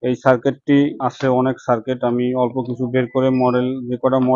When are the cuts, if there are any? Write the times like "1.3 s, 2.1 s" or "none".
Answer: 0.9 s